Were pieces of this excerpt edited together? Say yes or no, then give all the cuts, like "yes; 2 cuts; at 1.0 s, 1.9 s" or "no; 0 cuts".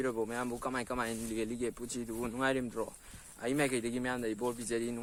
no; 0 cuts